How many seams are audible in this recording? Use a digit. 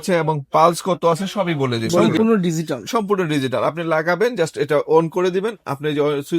1